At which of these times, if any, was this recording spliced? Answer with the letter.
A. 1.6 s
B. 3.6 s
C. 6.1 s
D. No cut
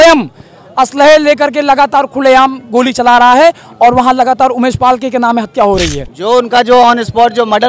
C